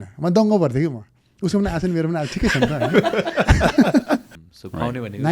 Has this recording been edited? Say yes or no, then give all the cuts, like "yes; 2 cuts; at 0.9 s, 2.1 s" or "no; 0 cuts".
yes; 1 cut; at 4.4 s